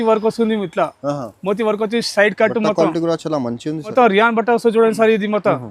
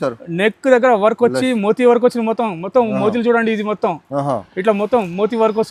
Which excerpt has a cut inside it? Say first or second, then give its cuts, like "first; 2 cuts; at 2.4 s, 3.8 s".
first; 1 cut; at 3.9 s